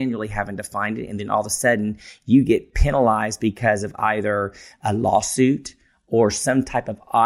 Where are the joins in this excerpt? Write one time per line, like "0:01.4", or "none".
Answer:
0:02.8